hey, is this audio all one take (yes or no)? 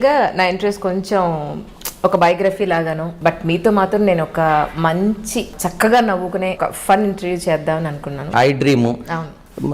no